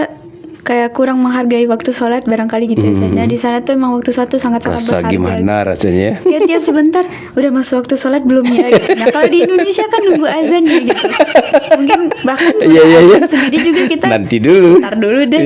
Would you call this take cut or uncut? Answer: uncut